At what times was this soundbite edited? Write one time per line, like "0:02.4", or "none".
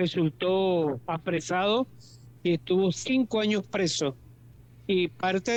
none